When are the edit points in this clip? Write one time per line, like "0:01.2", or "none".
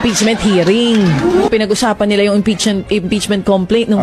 0:01.5

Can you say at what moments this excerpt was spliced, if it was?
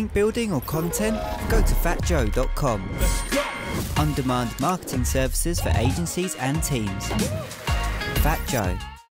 none

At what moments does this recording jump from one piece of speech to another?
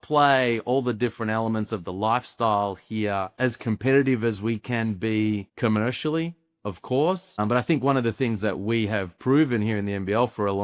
0:03.3
0:05.5
0:07.4

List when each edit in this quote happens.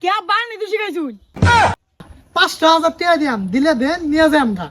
0:02.1

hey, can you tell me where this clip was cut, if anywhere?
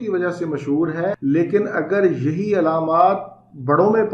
0:01.2

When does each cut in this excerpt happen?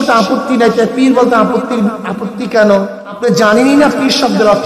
0:03.0

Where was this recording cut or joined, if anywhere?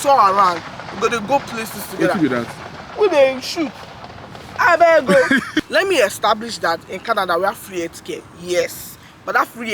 0:05.7

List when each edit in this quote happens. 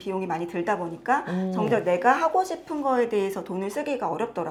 none

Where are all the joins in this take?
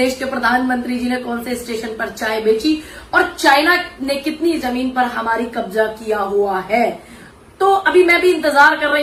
none

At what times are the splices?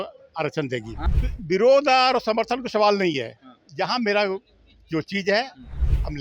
0:01.0

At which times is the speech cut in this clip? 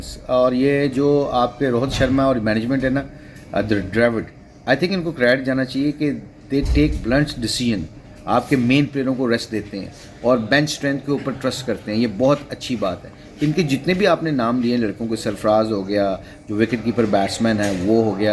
none

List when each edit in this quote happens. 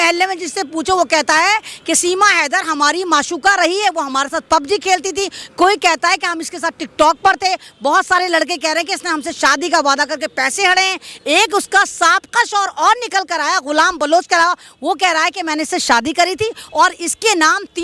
none

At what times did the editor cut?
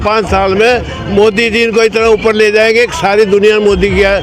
none

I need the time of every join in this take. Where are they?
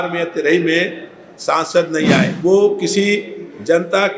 0:02.3

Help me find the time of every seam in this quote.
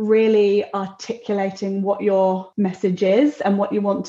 0:02.5

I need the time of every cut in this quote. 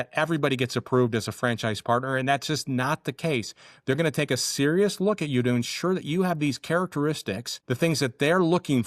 0:07.5

